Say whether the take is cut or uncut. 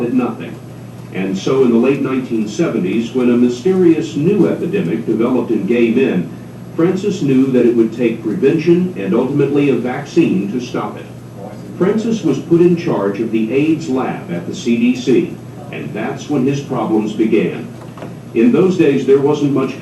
uncut